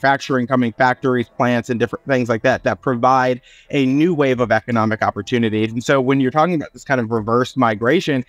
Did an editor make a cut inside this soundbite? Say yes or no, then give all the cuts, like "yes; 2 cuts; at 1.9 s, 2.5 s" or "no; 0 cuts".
no; 0 cuts